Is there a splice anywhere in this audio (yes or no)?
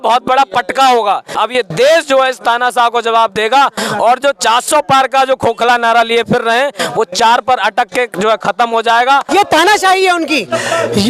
yes